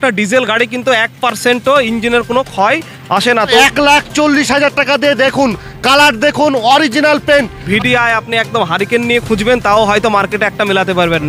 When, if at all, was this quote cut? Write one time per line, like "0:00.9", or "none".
0:03.6
0:07.6